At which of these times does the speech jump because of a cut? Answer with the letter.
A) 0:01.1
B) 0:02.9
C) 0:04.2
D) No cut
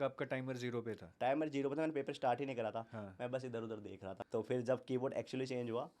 C